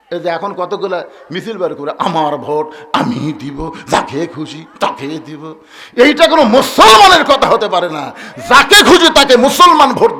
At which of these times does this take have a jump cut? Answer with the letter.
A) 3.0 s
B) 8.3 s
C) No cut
C